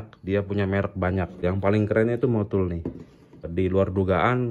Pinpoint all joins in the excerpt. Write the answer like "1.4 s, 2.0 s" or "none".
1.3 s, 3.5 s